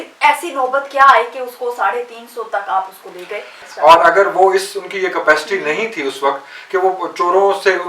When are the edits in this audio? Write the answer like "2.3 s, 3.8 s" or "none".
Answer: 3.5 s